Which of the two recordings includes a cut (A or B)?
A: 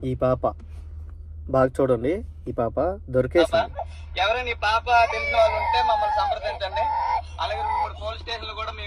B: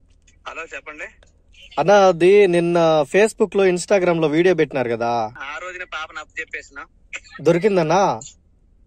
B